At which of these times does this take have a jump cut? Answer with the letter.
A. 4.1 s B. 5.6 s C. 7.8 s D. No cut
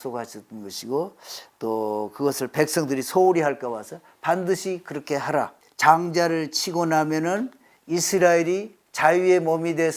B